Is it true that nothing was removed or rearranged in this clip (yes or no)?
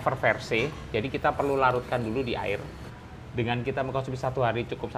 no